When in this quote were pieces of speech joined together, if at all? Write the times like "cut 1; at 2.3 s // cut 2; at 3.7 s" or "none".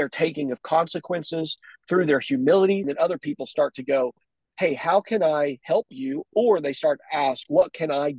cut 1; at 2.9 s